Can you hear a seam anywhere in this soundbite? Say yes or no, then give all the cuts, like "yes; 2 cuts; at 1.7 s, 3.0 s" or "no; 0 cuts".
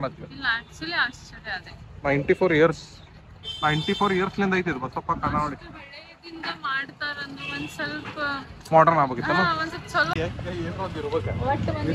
yes; 1 cut; at 10.1 s